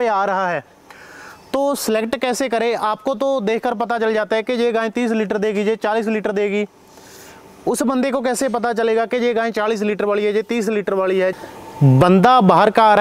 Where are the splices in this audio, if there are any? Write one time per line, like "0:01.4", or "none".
0:11.3